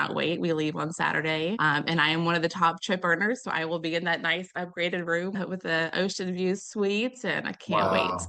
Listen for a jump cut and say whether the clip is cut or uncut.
cut